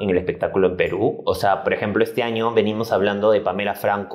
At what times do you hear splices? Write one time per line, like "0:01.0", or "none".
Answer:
none